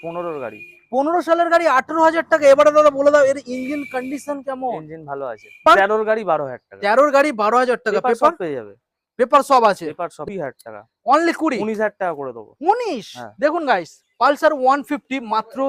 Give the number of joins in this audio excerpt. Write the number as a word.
two